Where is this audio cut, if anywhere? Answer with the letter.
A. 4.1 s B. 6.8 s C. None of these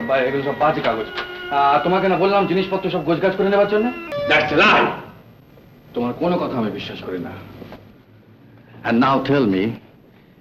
A